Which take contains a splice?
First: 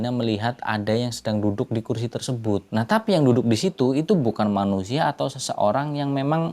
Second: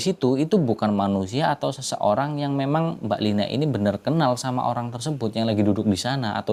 first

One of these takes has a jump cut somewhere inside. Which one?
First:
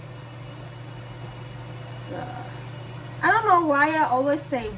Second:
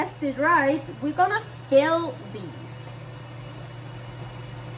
first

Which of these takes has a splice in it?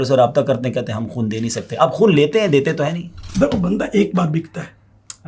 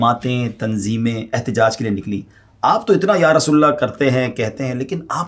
first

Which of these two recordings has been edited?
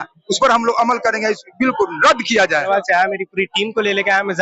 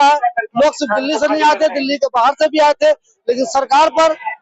first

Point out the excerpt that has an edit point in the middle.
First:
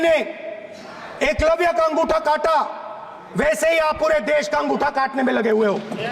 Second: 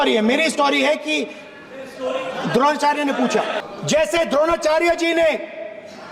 second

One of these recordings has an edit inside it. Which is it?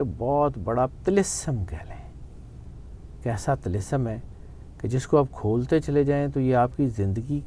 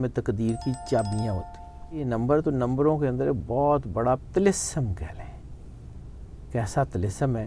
second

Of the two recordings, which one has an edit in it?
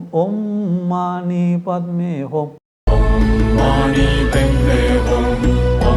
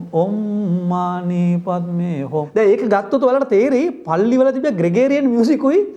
second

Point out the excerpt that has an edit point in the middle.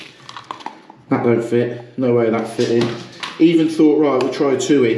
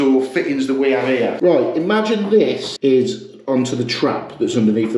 second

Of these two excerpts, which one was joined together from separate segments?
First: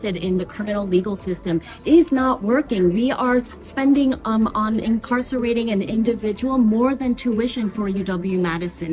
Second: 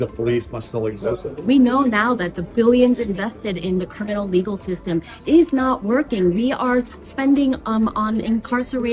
second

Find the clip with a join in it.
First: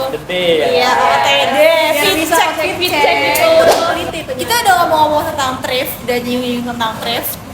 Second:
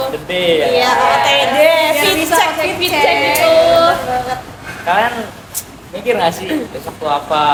first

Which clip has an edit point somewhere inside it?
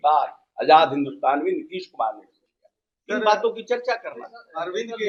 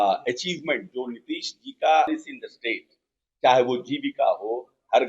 second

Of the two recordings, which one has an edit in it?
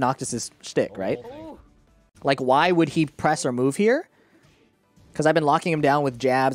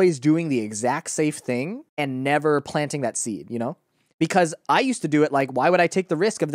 second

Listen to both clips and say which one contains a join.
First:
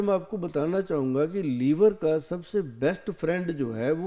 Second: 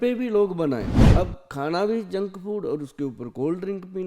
second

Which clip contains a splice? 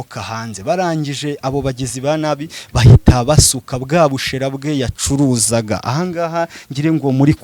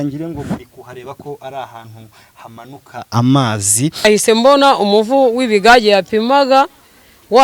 second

